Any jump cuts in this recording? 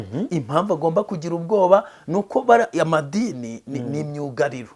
no; 0 cuts

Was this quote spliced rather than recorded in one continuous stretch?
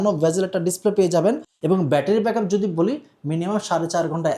yes; 1 cut; at 1.5 s

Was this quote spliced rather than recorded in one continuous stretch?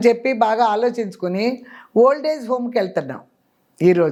no; 0 cuts

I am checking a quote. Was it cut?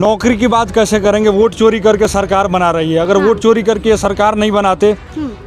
no; 0 cuts

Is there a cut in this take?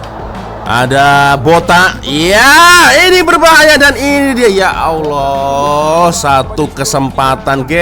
no; 0 cuts

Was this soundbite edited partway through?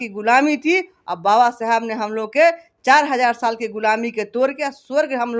no; 0 cuts

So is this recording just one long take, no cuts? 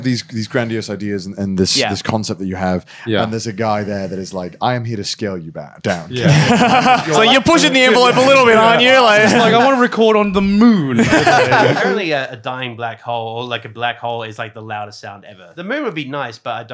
no; 3 cuts; at 7.1 s, 11.8 s, 15.5 s

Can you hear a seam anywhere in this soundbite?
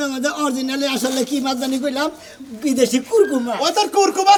no; 0 cuts

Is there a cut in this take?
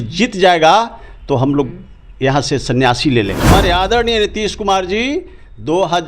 yes; 1 cut; at 3.5 s

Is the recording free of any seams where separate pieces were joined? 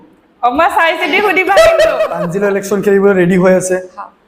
no; 1 cut; at 2.2 s

